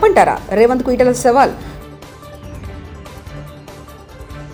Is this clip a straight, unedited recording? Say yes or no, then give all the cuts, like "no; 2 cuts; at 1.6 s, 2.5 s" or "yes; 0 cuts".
yes; 0 cuts